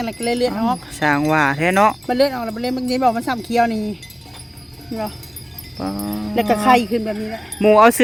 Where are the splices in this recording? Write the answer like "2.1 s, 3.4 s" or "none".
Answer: none